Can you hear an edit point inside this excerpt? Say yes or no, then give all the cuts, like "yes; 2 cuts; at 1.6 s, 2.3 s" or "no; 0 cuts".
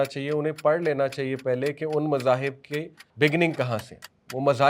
yes; 1 cut; at 3.0 s